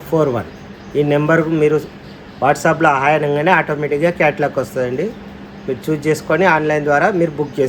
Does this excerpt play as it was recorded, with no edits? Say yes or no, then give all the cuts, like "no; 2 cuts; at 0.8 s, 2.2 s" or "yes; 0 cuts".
yes; 0 cuts